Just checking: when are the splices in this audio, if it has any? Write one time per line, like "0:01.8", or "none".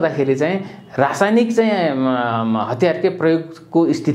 none